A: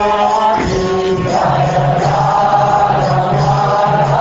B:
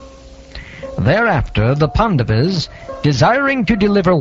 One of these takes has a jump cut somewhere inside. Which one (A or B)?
B